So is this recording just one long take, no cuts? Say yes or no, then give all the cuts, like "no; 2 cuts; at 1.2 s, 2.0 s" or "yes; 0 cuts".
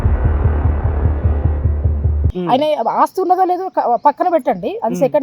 no; 1 cut; at 2.2 s